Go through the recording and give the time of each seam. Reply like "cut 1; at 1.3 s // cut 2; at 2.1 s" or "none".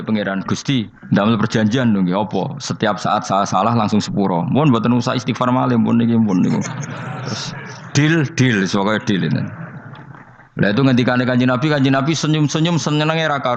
cut 1; at 1.0 s